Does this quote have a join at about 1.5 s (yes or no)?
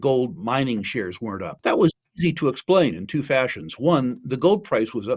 yes